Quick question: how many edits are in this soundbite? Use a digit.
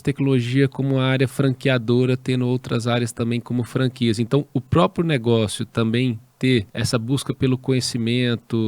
1